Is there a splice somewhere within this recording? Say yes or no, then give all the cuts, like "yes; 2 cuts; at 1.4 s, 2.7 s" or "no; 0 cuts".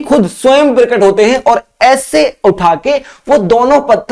no; 0 cuts